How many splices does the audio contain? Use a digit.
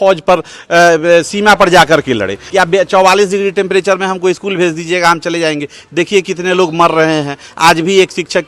1